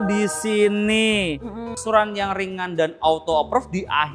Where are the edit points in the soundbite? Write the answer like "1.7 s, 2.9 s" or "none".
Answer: 1.7 s